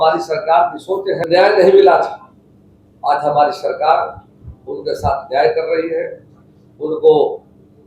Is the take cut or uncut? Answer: cut